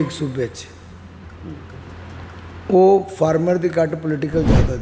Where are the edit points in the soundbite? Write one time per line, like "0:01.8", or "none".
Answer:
none